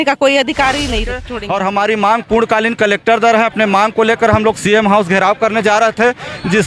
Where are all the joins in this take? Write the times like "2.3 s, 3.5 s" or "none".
1.3 s